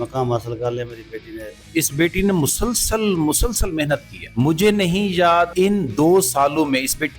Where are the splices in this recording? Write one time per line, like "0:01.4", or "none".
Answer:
0:01.6
0:04.2
0:05.5